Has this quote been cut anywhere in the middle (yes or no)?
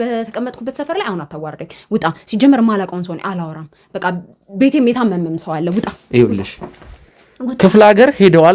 no